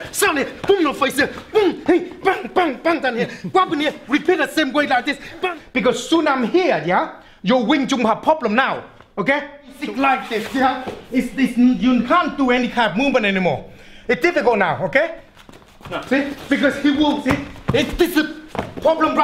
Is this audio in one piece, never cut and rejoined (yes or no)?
no